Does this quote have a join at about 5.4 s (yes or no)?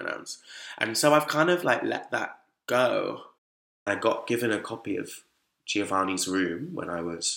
no